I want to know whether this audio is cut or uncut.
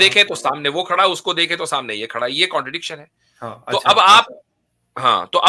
uncut